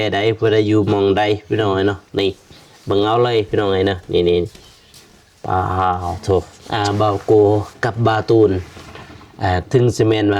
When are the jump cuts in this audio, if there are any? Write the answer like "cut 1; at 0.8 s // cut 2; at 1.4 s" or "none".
cut 1; at 6.6 s